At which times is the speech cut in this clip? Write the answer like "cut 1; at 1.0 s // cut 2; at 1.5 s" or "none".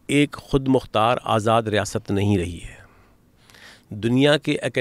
none

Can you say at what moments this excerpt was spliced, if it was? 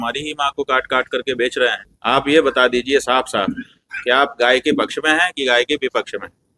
cut 1; at 1.9 s

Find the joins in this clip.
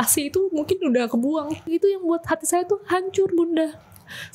cut 1; at 1.7 s

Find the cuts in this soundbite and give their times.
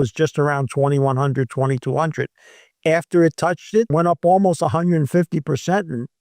cut 1; at 3.9 s

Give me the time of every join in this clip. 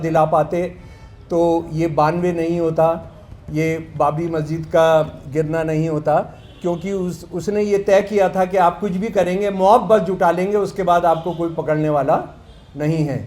none

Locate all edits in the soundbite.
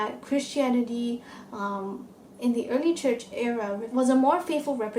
cut 1; at 3.9 s

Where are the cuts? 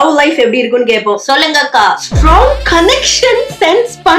cut 1; at 1.2 s

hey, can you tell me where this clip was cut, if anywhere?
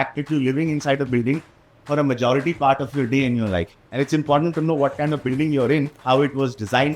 cut 1; at 3.8 s // cut 2; at 5.9 s

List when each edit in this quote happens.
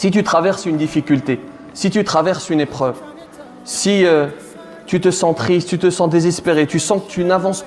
none

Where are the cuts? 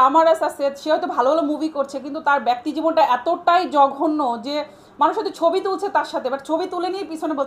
none

